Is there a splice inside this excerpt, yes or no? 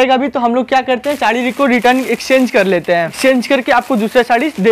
yes